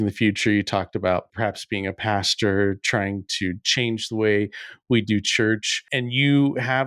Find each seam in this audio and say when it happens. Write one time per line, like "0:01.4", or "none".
0:01.3
0:05.9